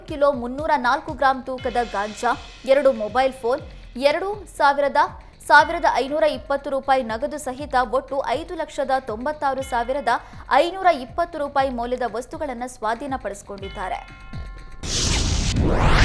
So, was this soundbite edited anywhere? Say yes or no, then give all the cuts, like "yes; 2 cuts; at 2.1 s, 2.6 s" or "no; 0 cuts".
yes; 1 cut; at 14.6 s